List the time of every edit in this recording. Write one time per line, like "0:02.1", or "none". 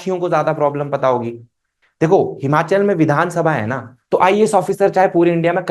none